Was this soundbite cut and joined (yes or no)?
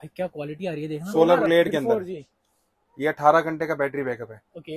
yes